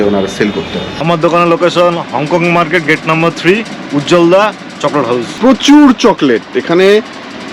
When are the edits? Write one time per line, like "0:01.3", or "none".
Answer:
0:01.0
0:05.3